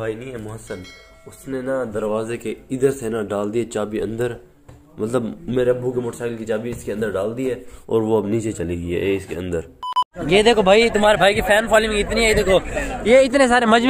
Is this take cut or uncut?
cut